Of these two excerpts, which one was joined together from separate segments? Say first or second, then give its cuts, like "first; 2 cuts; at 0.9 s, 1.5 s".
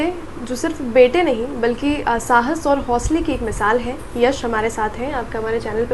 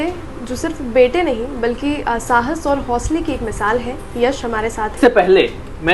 second; 1 cut; at 4.9 s